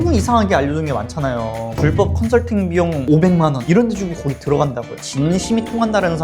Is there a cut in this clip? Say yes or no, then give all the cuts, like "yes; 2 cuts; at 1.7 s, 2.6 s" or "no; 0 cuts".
yes; 1 cut; at 4.9 s